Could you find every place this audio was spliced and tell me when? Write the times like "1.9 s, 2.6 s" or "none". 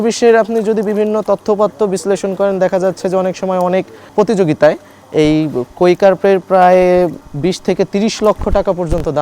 4.0 s, 7.2 s